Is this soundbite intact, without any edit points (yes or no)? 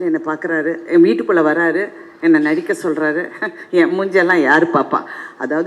yes